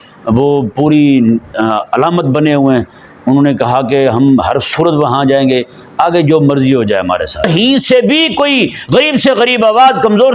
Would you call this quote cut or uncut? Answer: cut